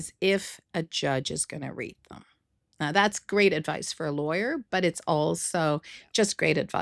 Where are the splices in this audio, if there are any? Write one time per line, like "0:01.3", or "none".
none